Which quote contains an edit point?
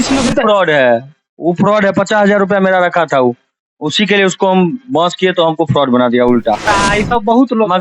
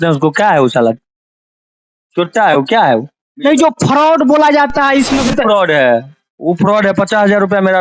first; 1 cut; at 6.7 s

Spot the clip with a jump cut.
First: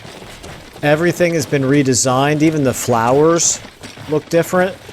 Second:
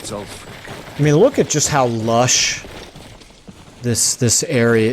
second; 1 cut; at 0.9 s

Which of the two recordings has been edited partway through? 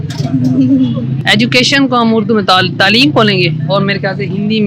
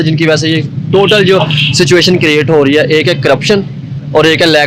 first; 1 cut; at 1.1 s

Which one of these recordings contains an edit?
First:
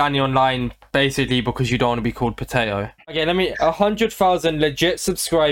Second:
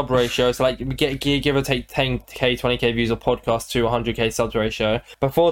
first; 1 cut; at 3.1 s

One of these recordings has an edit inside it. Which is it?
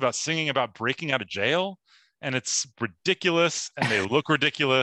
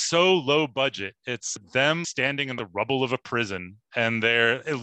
second; 1 cut; at 1.6 s

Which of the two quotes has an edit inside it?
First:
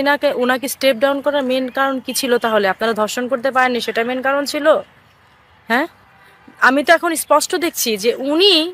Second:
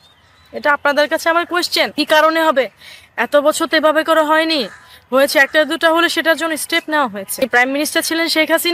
second; 2 cuts; at 1.9 s, 7.4 s

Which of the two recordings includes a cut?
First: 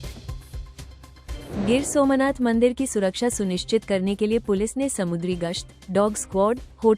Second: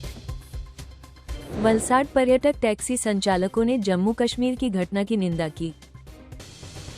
second; 1 cut; at 1.5 s

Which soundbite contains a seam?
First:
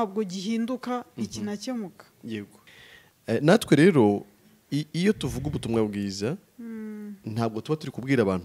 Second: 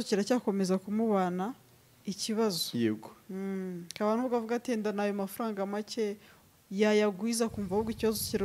first; 1 cut; at 2.6 s

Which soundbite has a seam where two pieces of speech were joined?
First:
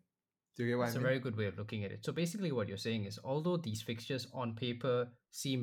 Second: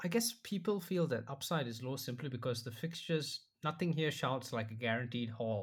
first; 1 cut; at 1.0 s

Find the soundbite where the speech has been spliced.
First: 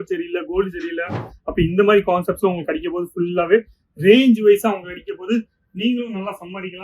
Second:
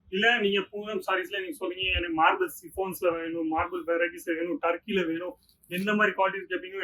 first; 1 cut; at 1.3 s

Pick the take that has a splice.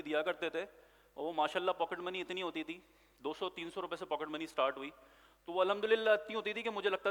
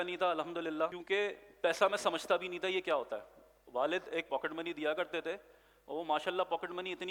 second; 1 cut; at 1.0 s

